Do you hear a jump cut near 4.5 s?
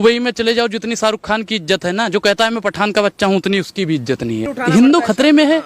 yes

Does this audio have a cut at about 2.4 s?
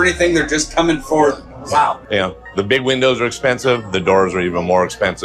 no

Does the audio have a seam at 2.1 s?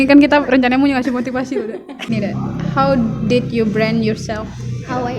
yes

